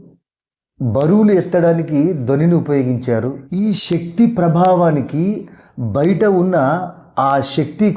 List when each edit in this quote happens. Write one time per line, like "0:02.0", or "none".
0:03.4